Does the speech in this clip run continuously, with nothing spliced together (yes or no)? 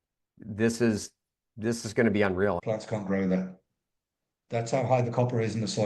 no